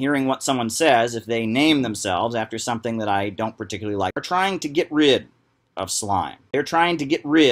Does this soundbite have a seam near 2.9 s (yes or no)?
no